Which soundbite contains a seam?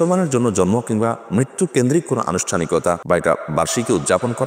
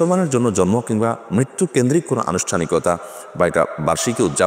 first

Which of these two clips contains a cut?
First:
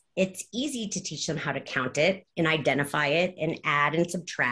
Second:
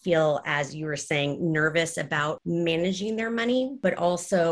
second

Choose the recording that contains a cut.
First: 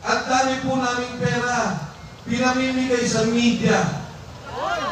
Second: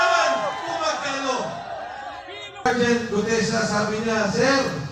second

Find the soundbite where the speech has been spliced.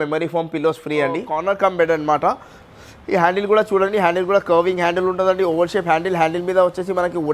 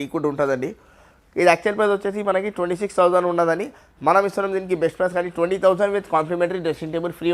first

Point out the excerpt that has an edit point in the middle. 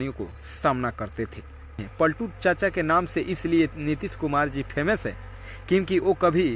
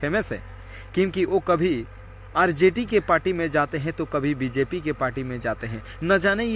first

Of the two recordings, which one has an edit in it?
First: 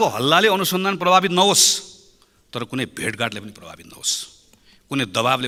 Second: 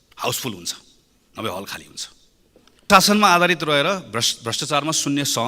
second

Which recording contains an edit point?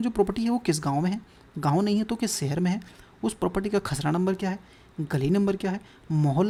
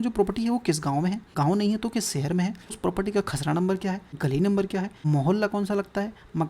second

